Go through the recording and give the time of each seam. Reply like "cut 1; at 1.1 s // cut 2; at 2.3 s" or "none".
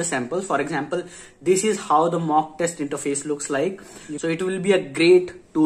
cut 1; at 4.0 s